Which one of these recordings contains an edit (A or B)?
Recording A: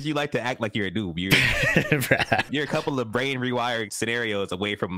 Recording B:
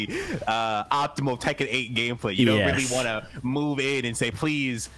A